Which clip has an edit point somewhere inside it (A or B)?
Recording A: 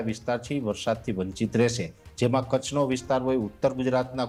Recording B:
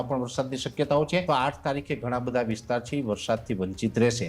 B